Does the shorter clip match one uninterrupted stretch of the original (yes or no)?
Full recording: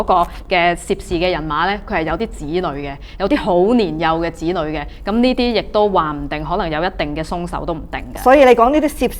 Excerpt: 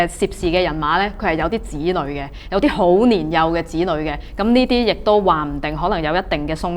yes